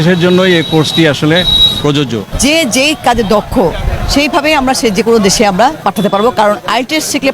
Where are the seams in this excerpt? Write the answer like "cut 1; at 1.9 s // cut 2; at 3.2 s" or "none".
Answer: cut 1; at 2.3 s // cut 2; at 5.8 s